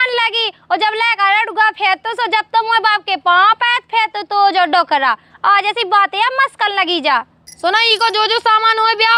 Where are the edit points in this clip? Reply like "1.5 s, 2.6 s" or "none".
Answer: none